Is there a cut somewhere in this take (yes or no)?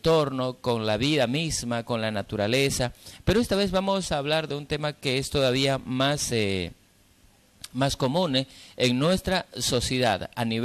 no